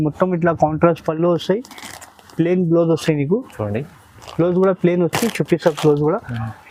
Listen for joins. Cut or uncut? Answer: uncut